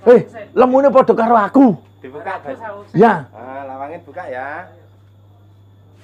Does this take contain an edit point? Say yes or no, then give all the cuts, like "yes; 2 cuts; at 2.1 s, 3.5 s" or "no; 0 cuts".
no; 0 cuts